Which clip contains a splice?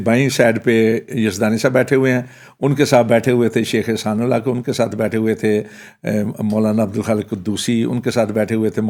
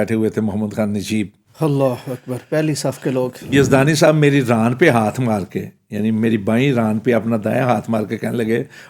second; 2 cuts; at 1.4 s, 3.5 s

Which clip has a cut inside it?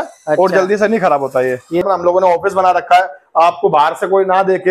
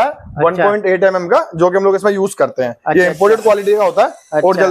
first; 1 cut; at 1.8 s

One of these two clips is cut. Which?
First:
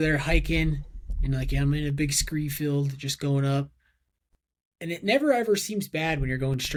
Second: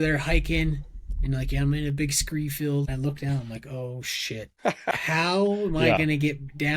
second; 2 cuts; at 2.9 s, 4.9 s

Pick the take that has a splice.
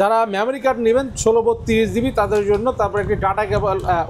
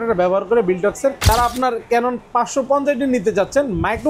second; 1 cut; at 1.3 s

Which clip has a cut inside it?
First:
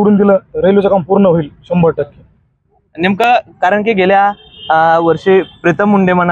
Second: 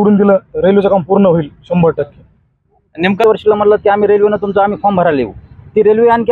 second; 1 cut; at 3.2 s

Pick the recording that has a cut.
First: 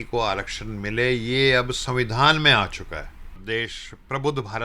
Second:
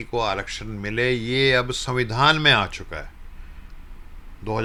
first; 1 cut; at 3.4 s

